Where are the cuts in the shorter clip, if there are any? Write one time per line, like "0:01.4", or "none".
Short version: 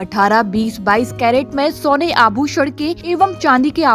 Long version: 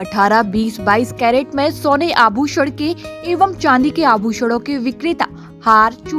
0:03.0